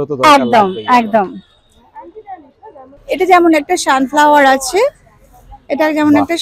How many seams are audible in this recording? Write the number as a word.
one